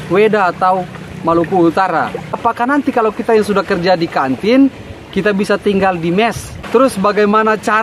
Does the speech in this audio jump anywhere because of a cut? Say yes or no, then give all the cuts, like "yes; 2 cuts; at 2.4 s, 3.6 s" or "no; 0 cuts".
yes; 2 cuts; at 2.3 s, 6.5 s